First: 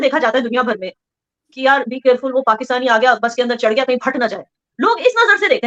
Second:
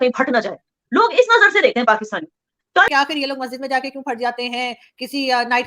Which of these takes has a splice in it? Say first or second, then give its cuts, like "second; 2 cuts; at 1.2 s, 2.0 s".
second; 1 cut; at 2.9 s